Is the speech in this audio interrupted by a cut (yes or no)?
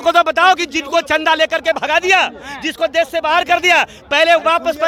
no